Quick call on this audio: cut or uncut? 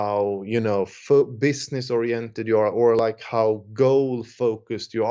uncut